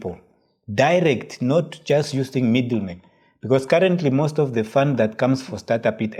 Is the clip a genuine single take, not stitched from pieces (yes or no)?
yes